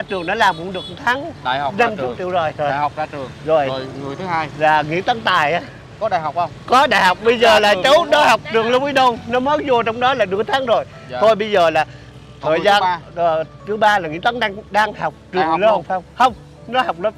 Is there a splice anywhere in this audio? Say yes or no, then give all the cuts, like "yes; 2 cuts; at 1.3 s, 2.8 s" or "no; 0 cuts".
no; 0 cuts